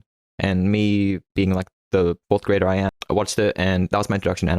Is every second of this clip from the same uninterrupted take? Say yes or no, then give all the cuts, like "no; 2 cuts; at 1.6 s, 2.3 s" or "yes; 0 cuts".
no; 1 cut; at 3.0 s